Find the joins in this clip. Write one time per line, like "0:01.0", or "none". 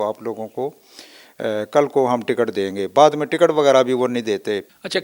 none